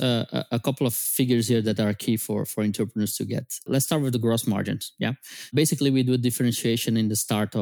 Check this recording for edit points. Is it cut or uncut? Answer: cut